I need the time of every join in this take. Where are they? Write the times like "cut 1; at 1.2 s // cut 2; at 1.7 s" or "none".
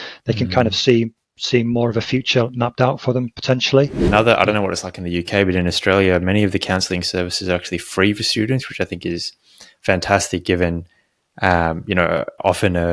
cut 1; at 4.0 s